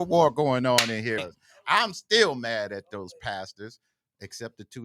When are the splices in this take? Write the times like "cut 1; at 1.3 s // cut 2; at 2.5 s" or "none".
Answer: cut 1; at 1.3 s